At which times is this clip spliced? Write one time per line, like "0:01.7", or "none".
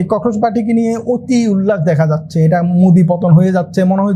none